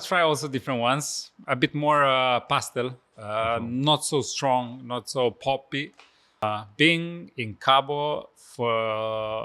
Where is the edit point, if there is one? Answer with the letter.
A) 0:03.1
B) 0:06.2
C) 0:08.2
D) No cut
B